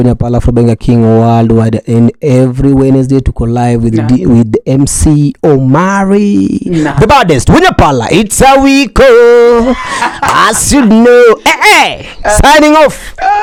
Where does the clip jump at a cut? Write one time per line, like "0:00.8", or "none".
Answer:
none

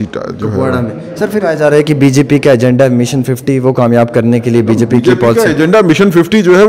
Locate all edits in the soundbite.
0:01.1

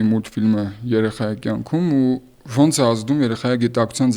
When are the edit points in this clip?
none

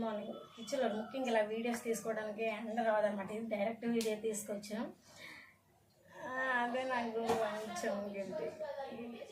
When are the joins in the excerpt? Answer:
none

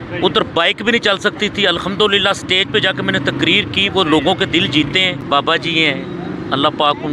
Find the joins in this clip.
0:05.2

